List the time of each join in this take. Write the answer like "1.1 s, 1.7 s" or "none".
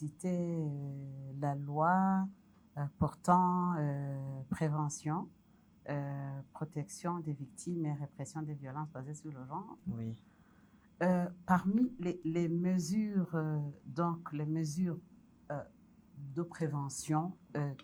none